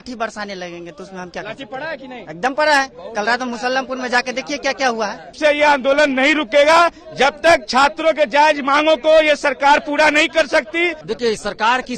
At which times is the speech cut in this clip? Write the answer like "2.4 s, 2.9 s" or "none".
5.3 s, 11.0 s